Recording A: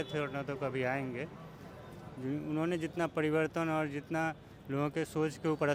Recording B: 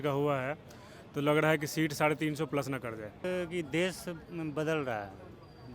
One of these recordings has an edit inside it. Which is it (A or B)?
B